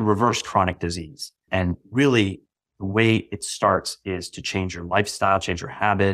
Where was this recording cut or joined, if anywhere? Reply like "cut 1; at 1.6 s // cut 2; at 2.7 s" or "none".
cut 1; at 1.4 s